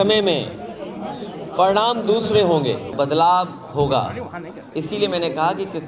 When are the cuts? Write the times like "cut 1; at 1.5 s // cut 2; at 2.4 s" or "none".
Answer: cut 1; at 2.9 s